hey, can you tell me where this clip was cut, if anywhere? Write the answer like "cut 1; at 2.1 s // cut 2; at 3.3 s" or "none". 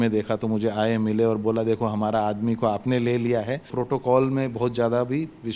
cut 1; at 3.7 s